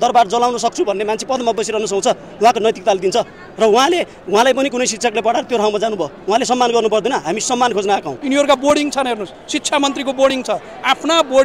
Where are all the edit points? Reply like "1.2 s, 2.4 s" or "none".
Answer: 8.1 s